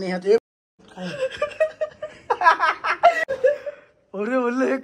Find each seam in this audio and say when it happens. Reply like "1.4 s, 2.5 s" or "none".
3.3 s